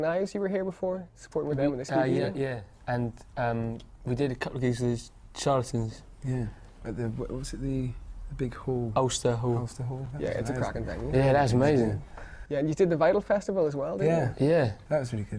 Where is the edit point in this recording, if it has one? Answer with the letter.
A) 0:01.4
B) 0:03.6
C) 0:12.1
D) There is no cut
D